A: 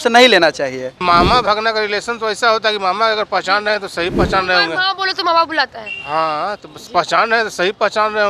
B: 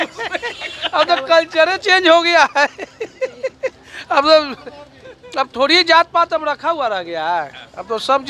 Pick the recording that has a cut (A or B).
A